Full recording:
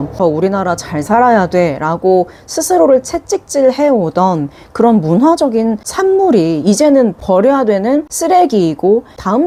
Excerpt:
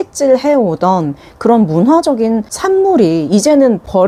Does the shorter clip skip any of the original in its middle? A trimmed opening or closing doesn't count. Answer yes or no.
no